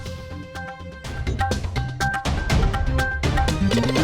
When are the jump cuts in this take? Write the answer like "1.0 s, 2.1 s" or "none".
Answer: 1.1 s

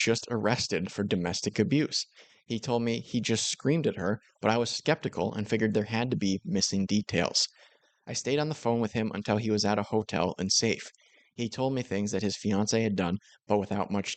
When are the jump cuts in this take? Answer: none

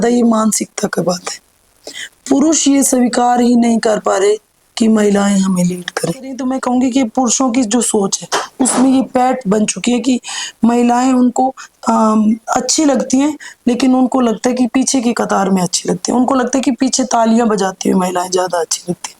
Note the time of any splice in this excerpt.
6.4 s

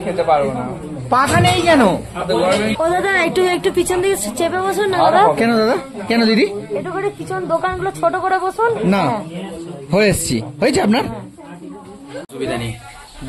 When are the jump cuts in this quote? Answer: 2.7 s, 12.3 s

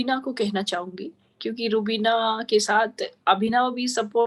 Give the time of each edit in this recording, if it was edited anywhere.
none

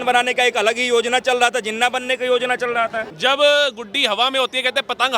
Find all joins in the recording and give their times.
3.0 s

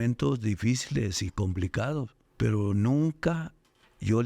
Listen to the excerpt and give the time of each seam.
2.2 s

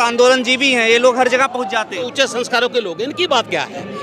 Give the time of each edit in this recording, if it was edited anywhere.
2.1 s

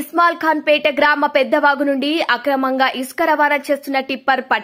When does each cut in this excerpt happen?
none

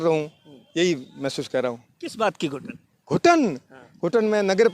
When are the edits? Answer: none

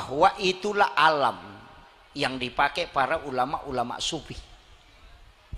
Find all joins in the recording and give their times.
none

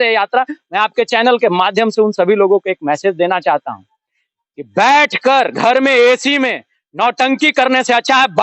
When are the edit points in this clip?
none

